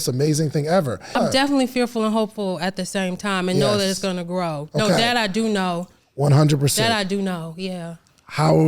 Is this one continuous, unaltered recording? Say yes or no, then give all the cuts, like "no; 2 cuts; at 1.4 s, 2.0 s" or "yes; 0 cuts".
no; 1 cut; at 1.2 s